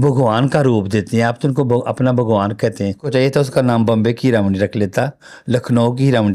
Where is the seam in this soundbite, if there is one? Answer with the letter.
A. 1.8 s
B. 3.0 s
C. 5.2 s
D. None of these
B